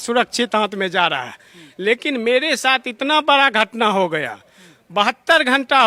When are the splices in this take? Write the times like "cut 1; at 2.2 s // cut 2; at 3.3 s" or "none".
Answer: none

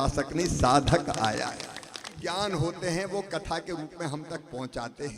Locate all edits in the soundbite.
cut 1; at 2.2 s

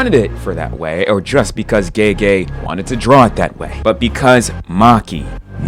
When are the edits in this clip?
none

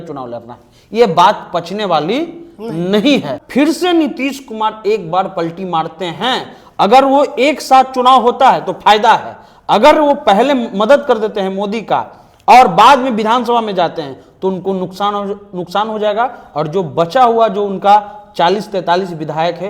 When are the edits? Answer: cut 1; at 3.4 s

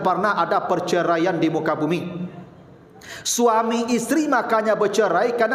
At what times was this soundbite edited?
none

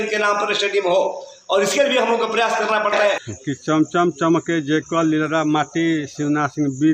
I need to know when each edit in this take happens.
cut 1; at 3.2 s

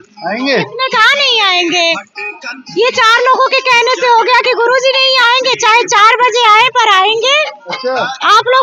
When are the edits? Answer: none

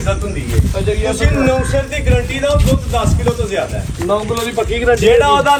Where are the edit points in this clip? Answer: none

